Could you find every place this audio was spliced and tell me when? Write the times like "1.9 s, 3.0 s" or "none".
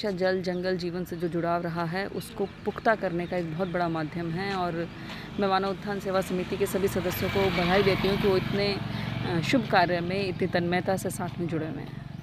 none